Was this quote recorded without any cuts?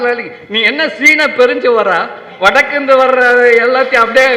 yes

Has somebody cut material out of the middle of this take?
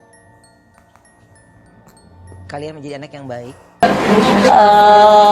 yes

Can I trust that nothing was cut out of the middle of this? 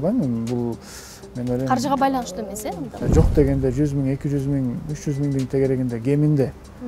no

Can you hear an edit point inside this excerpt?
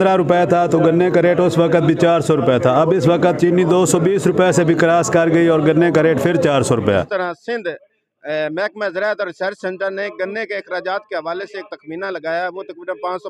yes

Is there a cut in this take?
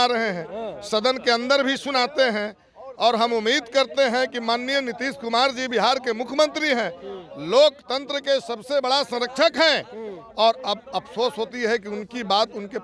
no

